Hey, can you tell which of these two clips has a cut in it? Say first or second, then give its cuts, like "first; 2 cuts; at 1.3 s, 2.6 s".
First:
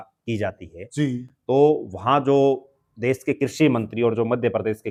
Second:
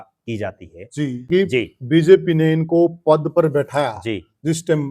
second; 1 cut; at 1.2 s